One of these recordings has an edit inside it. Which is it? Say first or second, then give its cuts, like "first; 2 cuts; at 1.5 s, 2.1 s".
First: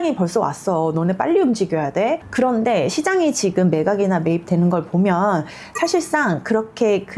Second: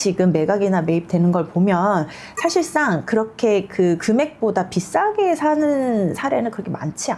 first; 1 cut; at 2.2 s